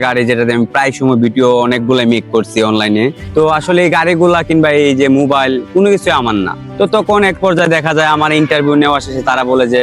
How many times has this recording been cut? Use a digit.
2